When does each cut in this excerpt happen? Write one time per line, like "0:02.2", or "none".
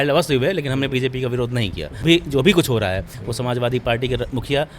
0:02.0